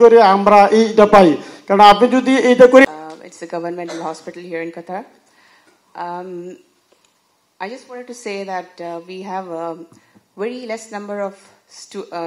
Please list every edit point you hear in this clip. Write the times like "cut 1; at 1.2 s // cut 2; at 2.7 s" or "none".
cut 1; at 2.8 s